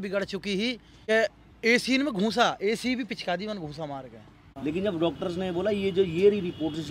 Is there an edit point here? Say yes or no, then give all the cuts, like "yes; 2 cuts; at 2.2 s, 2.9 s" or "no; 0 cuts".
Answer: yes; 2 cuts; at 0.9 s, 4.6 s